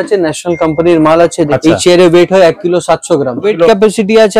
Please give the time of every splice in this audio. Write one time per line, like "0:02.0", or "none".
0:01.5
0:03.5